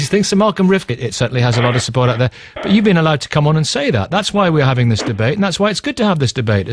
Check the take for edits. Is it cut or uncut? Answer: uncut